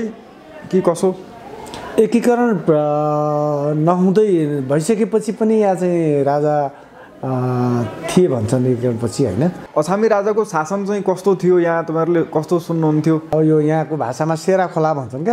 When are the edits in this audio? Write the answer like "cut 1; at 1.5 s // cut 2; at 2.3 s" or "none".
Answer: cut 1; at 9.6 s // cut 2; at 13.3 s